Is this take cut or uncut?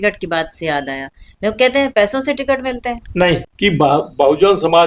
cut